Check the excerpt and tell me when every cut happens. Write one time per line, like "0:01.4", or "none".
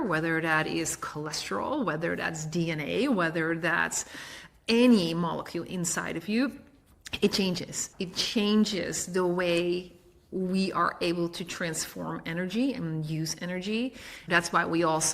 0:07.8
0:14.1

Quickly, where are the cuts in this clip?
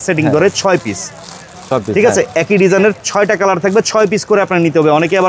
none

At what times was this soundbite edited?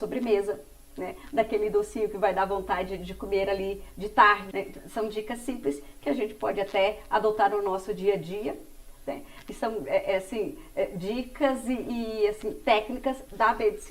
0:04.5

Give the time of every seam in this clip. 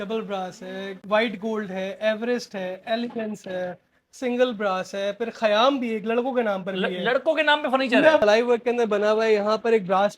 0:08.2

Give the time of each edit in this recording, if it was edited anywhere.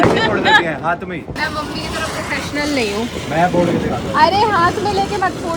0:01.3

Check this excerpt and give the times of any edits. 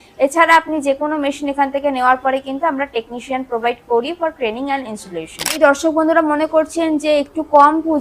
0:05.6

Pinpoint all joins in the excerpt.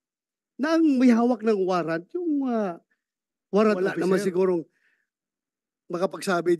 0:03.9

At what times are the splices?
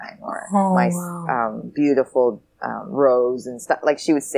none

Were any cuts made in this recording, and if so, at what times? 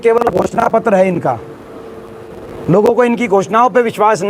none

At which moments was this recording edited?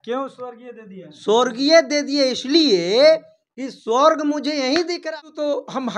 0:05.0

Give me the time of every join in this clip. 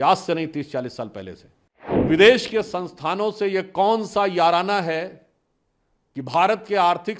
0:02.1

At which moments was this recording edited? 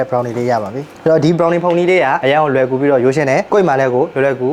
0:00.9

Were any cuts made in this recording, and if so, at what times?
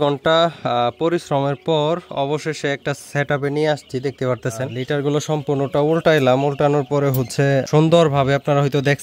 0:04.9
0:07.6

